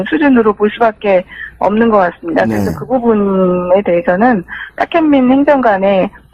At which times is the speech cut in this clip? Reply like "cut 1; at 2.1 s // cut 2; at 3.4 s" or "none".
cut 1; at 0.9 s